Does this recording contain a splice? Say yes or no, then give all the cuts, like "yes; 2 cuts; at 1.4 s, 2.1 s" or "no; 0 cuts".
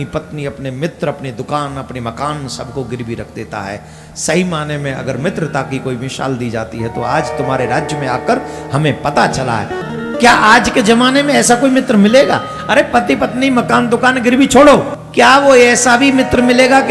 yes; 2 cuts; at 9.9 s, 15.0 s